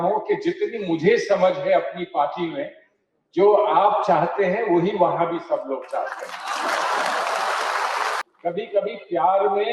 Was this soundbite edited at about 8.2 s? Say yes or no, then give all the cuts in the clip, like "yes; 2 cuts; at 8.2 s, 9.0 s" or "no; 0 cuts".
yes; 1 cut; at 8.2 s